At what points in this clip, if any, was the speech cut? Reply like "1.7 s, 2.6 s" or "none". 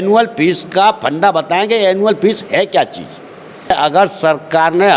3.7 s